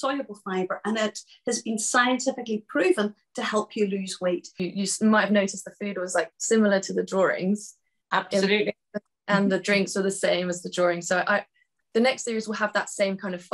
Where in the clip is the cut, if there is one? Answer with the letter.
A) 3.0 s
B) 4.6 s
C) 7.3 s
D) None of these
B